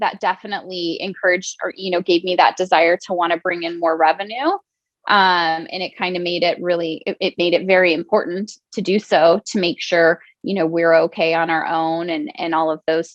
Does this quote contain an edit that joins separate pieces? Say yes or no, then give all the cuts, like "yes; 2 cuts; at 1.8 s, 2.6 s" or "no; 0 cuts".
no; 0 cuts